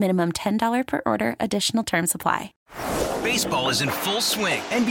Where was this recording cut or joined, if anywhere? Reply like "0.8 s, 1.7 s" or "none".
2.6 s